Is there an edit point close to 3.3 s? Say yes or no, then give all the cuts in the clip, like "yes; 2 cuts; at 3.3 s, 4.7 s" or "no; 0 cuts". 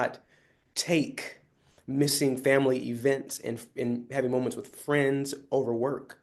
no; 0 cuts